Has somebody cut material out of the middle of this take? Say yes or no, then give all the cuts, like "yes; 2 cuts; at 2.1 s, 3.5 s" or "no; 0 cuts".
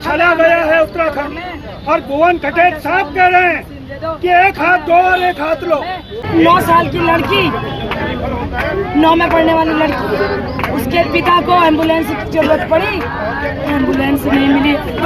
yes; 1 cut; at 6.2 s